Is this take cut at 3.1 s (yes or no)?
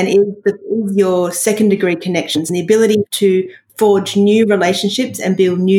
yes